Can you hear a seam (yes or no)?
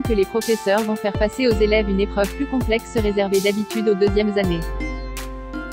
yes